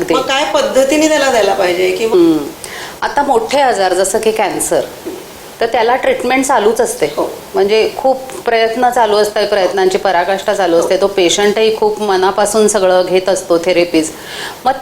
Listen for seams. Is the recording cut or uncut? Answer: cut